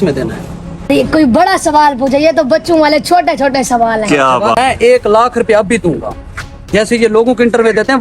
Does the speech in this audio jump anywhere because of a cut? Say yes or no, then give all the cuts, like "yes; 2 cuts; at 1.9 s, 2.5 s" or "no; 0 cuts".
yes; 2 cuts; at 0.9 s, 4.6 s